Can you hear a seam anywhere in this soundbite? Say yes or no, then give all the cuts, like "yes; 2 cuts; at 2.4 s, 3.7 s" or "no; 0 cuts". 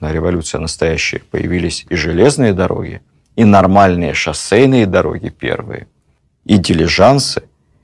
no; 0 cuts